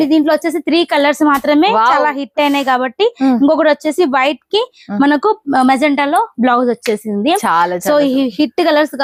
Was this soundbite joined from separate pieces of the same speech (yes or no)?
no